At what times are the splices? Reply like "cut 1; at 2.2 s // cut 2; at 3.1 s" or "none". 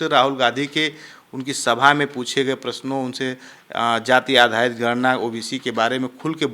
none